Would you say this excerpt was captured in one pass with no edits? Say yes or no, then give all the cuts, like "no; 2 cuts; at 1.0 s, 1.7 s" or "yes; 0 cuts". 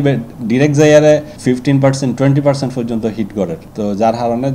no; 2 cuts; at 1.3 s, 3.6 s